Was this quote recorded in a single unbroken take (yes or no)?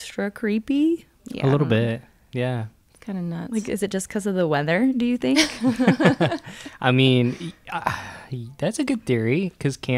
yes